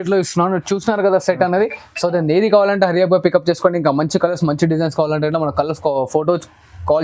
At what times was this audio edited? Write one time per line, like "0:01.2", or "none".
none